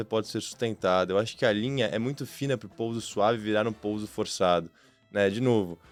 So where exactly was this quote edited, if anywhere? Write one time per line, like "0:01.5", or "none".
none